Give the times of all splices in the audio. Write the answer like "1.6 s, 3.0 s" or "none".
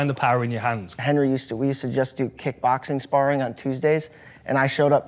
0.9 s

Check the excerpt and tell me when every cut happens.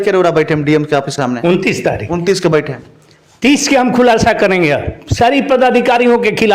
1.1 s

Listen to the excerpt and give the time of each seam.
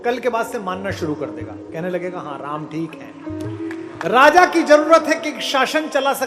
3.9 s

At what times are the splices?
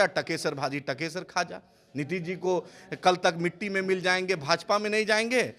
none

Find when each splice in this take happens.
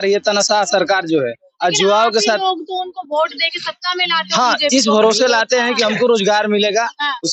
none

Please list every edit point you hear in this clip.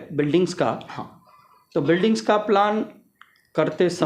none

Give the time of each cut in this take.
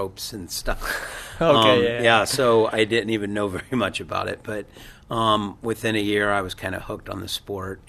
none

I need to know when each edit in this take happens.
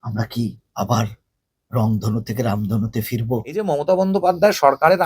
3.7 s

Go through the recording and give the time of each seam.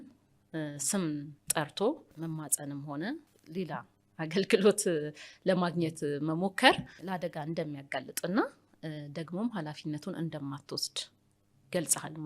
2.1 s, 3.3 s, 6.9 s

